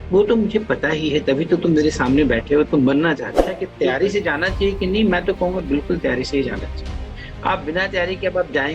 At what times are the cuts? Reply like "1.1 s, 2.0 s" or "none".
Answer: 3.6 s